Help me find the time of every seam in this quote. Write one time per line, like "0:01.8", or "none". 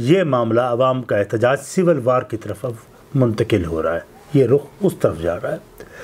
none